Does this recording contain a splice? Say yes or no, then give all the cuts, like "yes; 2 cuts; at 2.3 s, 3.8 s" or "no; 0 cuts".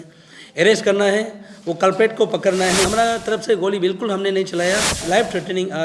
yes; 2 cuts; at 2.9 s, 5.0 s